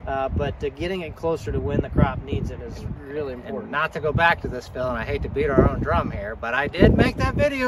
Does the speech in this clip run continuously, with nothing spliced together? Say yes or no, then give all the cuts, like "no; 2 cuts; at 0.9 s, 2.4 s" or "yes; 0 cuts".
yes; 0 cuts